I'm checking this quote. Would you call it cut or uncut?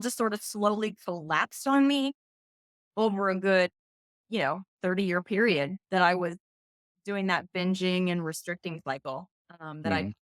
uncut